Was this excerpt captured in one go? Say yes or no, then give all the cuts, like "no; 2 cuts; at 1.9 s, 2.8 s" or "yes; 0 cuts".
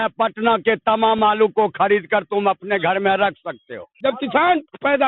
no; 1 cut; at 3.9 s